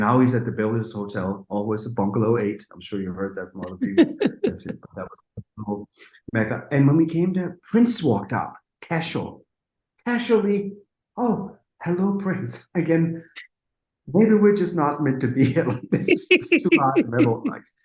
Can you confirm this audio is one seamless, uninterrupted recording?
yes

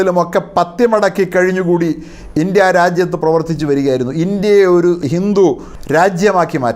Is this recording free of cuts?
no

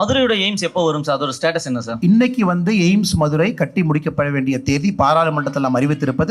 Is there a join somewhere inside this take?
yes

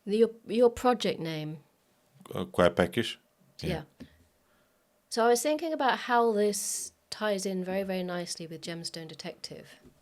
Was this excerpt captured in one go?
yes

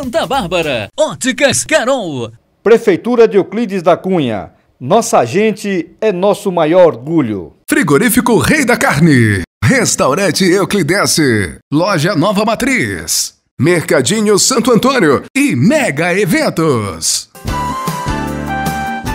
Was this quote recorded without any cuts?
yes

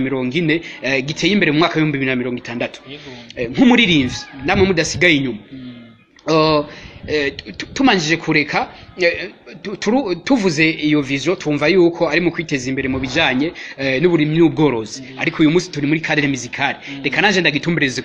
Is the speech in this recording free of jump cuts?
yes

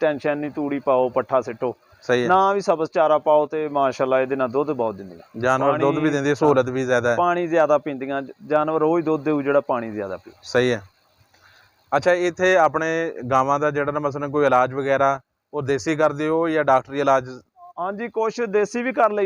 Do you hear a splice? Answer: no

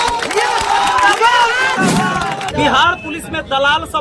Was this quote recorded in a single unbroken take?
no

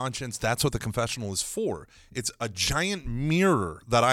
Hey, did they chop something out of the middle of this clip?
no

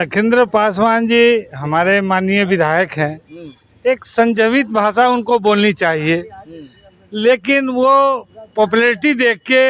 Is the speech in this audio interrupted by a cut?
no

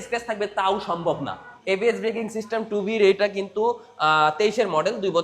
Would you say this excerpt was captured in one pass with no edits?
no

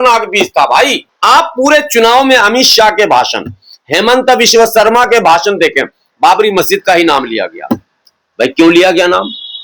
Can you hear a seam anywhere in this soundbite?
yes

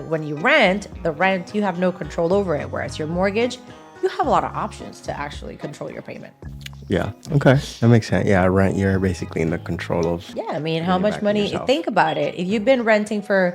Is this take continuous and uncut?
no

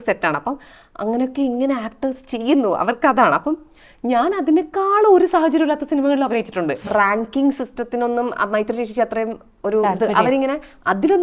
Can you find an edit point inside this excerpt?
yes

